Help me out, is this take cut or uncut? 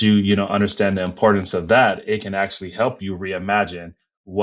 uncut